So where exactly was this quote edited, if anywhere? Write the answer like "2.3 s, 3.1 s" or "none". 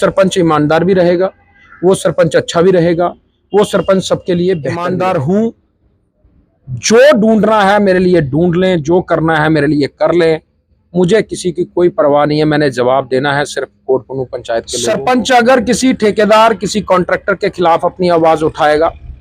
4.7 s, 14.7 s